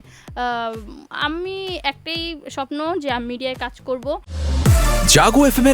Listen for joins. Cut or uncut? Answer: cut